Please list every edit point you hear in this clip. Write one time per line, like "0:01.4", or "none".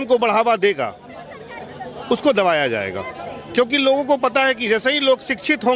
none